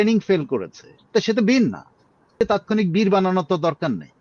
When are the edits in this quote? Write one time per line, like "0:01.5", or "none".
0:02.3